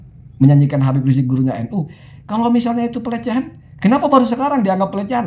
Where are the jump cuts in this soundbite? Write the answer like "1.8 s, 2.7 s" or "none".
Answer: none

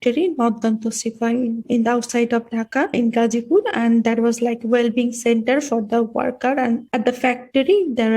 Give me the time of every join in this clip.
1.6 s, 2.9 s, 6.9 s

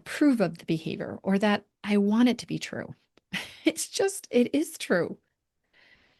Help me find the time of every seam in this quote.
none

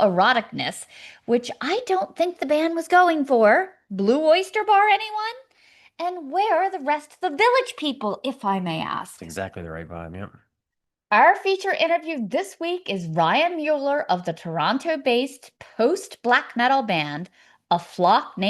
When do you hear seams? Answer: none

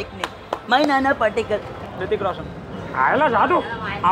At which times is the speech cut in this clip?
1.8 s

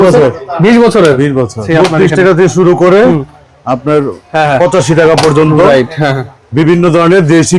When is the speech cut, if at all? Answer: 1.7 s

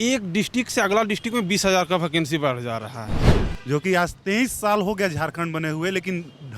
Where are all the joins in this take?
3.4 s

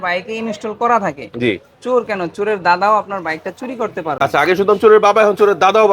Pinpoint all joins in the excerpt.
none

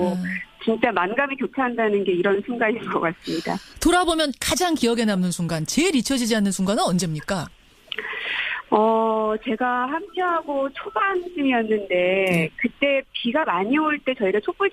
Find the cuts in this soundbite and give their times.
5.7 s

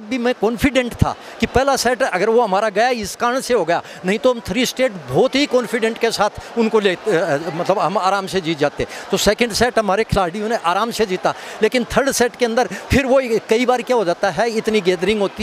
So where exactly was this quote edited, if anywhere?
none

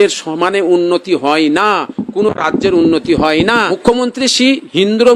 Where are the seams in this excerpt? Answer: 3.8 s

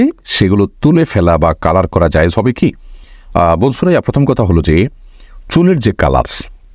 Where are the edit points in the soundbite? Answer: none

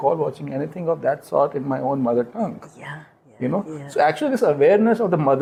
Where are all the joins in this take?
none

